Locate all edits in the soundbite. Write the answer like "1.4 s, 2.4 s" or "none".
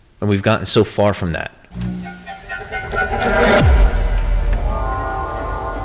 1.6 s